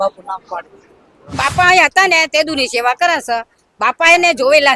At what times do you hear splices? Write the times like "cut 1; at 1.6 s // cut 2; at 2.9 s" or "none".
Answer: cut 1; at 1.3 s